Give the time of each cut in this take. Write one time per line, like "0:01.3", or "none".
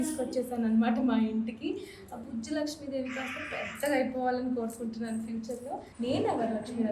0:05.9

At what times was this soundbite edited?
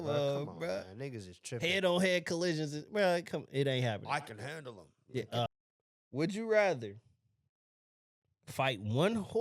0:05.5

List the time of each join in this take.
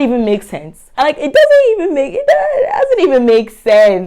0:00.9

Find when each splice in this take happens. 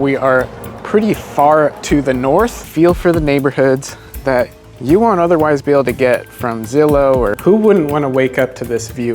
0:02.7
0:07.4

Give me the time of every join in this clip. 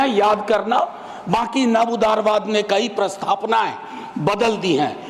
none

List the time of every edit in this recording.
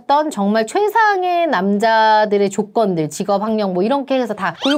none

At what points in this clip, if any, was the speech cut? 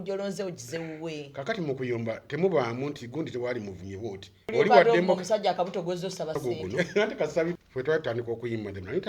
0:04.5
0:07.6

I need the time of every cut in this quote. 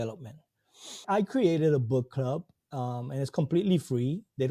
0:01.0

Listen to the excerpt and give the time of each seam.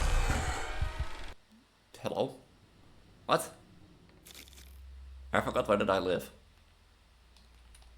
0:04.6

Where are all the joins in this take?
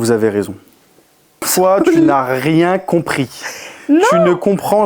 0:01.5

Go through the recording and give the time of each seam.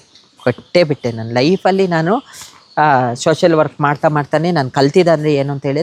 none

